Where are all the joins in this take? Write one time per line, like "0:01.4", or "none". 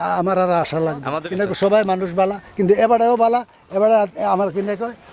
0:01.1